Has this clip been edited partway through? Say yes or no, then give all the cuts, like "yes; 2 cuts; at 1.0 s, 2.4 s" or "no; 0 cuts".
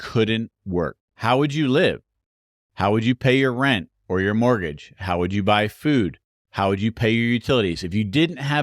yes; 1 cut; at 1.1 s